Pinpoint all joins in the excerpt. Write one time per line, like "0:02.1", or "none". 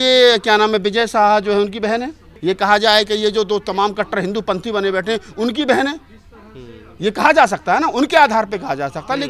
none

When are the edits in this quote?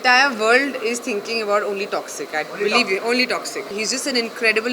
0:03.6

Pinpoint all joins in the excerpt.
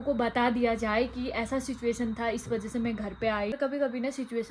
0:03.5

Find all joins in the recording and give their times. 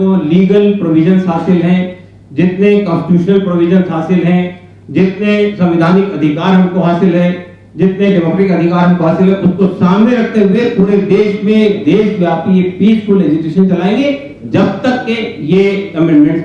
none

